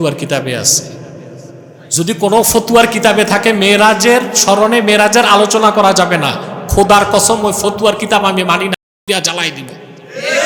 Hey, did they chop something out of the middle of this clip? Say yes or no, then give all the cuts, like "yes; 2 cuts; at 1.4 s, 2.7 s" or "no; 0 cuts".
no; 0 cuts